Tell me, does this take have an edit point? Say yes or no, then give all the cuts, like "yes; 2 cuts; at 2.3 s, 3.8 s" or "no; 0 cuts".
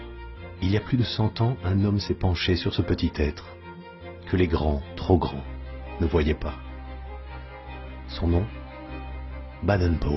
no; 0 cuts